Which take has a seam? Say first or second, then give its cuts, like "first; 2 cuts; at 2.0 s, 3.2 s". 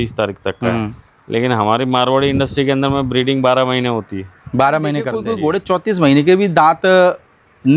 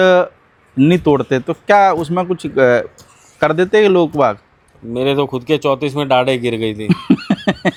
first; 1 cut; at 5.2 s